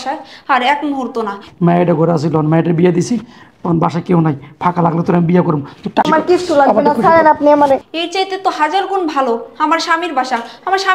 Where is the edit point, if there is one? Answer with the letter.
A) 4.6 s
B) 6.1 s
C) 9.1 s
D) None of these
B